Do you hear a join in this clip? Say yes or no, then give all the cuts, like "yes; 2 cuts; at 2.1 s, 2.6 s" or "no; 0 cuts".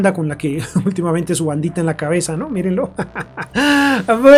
no; 0 cuts